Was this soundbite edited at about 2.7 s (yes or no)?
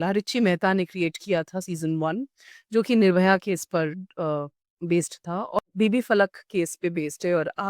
no